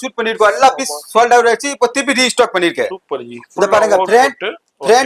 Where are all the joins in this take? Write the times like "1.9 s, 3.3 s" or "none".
none